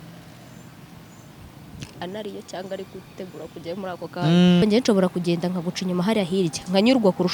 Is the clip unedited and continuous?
no; 1 cut; at 4.6 s

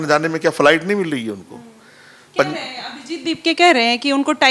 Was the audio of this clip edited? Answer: no; 0 cuts

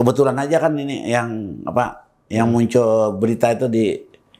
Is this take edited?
no; 0 cuts

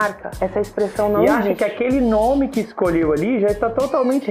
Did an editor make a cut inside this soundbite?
yes; 1 cut; at 1.6 s

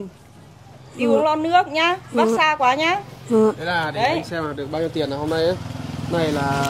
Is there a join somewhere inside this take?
no; 0 cuts

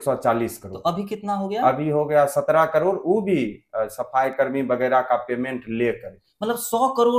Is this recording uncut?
yes; 0 cuts

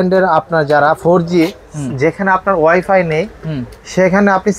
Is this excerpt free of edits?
yes; 0 cuts

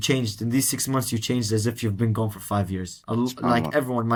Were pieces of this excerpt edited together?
no; 0 cuts

